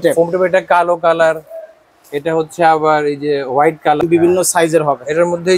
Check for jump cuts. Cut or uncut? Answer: cut